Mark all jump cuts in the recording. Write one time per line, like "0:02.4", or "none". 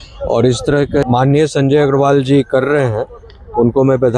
0:01.0